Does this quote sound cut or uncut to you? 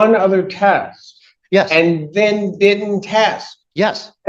uncut